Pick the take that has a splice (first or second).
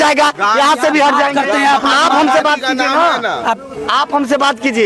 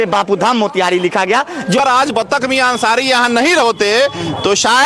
second